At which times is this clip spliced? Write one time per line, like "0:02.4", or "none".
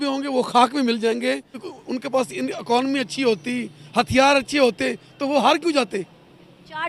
0:01.7